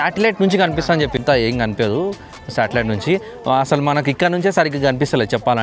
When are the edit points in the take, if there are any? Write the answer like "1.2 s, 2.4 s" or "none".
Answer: 1.2 s